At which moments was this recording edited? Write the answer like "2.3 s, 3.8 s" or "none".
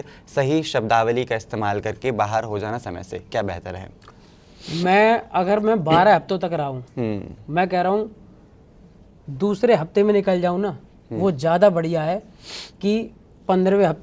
none